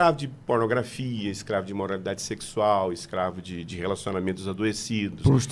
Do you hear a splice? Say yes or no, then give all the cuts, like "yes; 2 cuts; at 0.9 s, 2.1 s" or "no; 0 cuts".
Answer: no; 0 cuts